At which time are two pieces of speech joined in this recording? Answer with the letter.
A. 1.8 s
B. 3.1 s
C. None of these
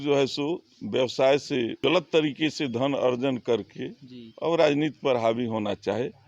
A